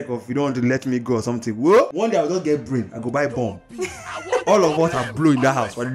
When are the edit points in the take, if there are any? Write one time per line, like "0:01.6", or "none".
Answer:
0:01.9